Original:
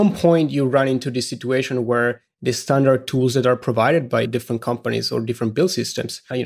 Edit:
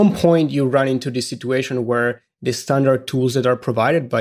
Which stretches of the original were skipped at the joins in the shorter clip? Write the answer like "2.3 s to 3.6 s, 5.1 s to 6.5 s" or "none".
none